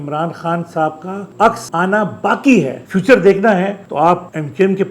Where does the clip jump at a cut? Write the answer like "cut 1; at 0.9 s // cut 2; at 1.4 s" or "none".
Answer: cut 1; at 2.9 s